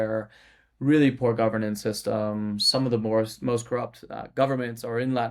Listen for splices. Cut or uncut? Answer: uncut